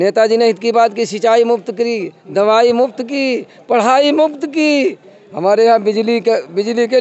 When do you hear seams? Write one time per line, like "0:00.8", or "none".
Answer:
none